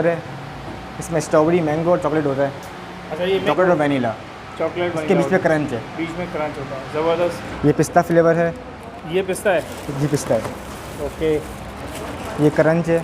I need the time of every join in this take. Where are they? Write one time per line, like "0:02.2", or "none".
0:03.4
0:07.5